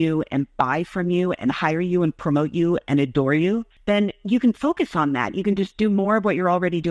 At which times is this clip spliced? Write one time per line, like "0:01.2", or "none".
0:03.7